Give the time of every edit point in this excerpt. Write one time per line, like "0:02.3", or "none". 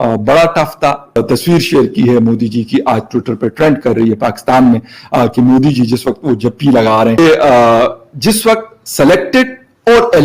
0:01.2
0:07.2

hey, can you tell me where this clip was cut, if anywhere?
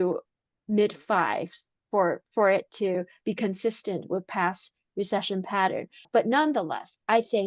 0:06.1

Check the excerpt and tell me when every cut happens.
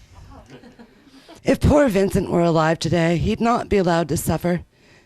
0:01.2

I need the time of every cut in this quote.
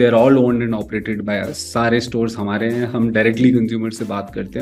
none

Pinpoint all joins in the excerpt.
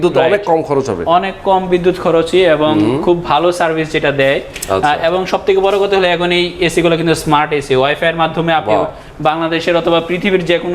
none

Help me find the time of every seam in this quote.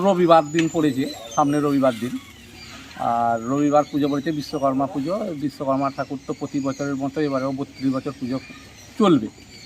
none

